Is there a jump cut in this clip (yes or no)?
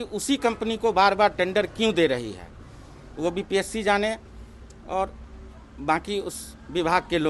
no